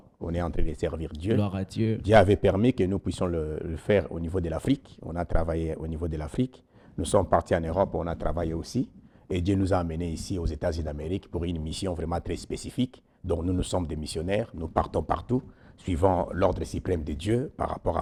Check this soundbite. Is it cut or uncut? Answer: uncut